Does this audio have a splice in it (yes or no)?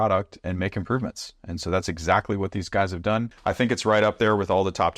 yes